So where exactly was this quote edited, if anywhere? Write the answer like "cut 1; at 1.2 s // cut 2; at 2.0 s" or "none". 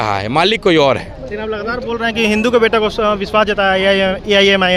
none